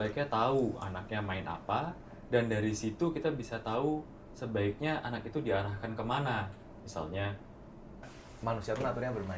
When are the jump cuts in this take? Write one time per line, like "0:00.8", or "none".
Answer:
0:08.1

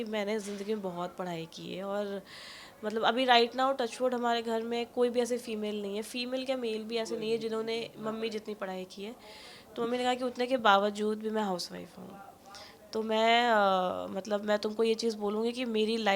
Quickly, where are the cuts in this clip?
none

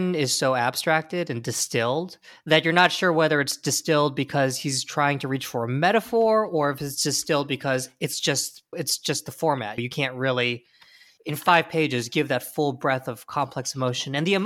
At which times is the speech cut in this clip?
none

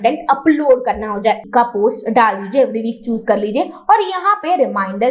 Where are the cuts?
0:01.4

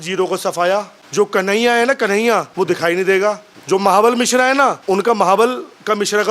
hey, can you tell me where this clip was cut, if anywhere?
0:01.0
0:02.5
0:03.5
0:04.8

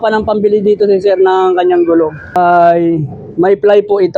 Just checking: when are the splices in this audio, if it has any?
0:02.4

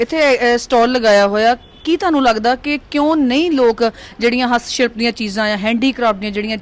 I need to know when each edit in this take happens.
none

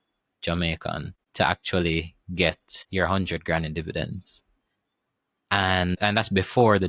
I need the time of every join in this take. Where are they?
0:01.1
0:02.7
0:06.0

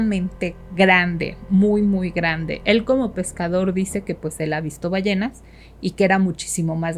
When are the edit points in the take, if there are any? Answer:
none

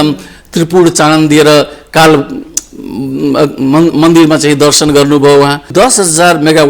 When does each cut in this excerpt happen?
0:05.7

